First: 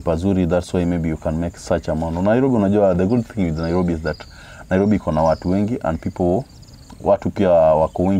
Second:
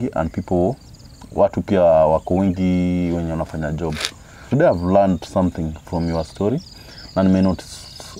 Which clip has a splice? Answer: second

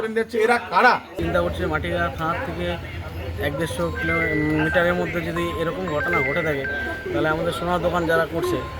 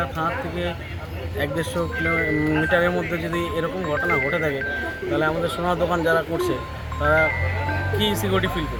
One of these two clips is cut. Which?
first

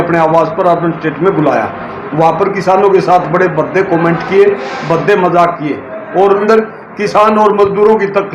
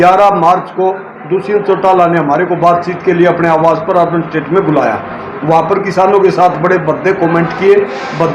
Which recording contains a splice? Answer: first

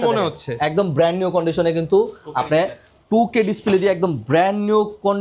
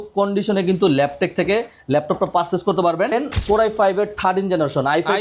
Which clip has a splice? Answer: second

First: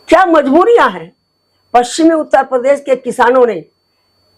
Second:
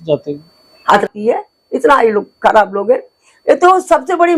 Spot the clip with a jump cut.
second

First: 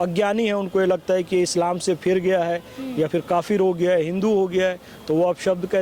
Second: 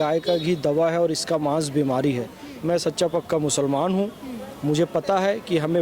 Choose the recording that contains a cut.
second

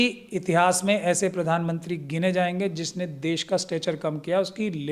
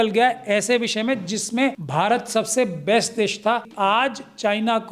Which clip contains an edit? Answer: second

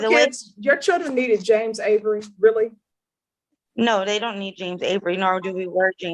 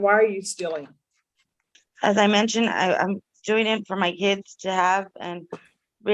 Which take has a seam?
second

